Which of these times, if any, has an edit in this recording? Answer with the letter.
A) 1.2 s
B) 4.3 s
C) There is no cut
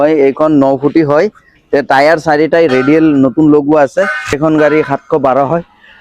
B